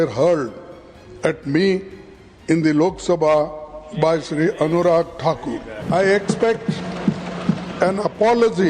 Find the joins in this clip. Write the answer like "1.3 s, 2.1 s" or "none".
5.9 s